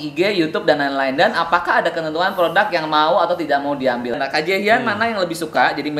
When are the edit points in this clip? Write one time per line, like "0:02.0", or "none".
0:04.2